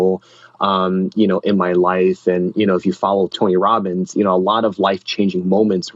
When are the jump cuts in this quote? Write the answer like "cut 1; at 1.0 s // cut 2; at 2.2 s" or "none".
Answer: cut 1; at 3.3 s